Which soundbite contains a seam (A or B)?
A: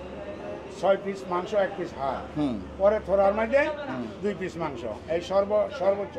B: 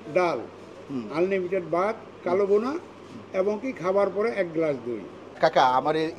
B